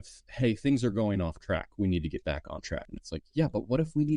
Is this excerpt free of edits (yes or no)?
no